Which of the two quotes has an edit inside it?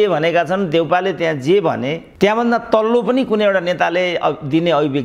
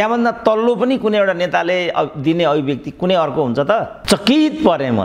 second; 1 cut; at 4.0 s

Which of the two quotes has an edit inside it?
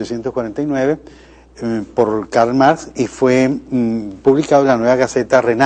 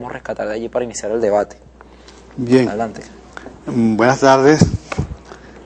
first; 1 cut; at 2.1 s

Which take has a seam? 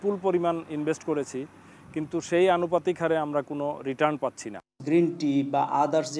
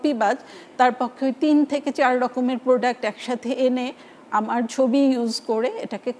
first; 1 cut; at 4.5 s

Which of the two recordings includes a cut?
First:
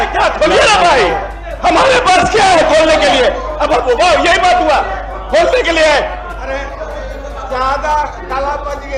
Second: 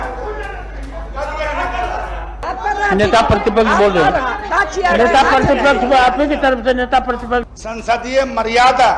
second; 2 cuts; at 2.4 s, 7.5 s

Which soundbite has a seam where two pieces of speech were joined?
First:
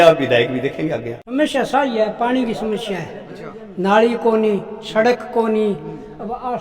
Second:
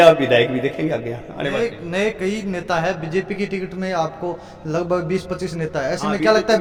first; 1 cut; at 1.2 s

